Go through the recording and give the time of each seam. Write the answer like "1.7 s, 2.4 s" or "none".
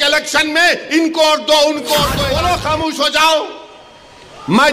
2.2 s